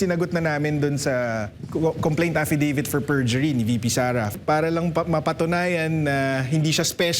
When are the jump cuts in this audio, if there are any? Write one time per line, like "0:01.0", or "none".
0:01.5
0:04.3